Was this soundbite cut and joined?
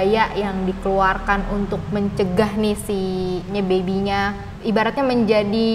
yes; 2 cuts; at 3.5 s, 4.5 s

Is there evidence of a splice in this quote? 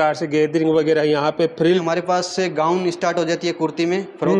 yes; 1 cut; at 1.8 s

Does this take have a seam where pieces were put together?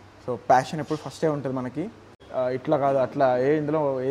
yes; 1 cut; at 2.1 s

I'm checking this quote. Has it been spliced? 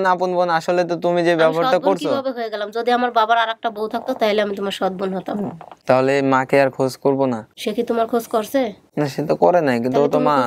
yes; 3 cuts; at 5.7 s, 7.5 s, 8.8 s

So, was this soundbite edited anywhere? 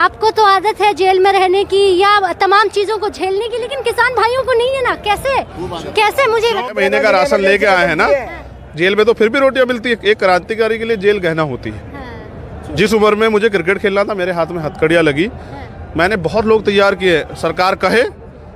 yes; 1 cut; at 6.7 s

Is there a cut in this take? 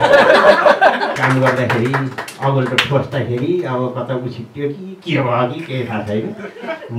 yes; 1 cut; at 1.1 s

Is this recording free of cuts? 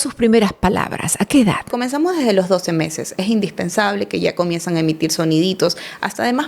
no; 1 cut; at 1.7 s

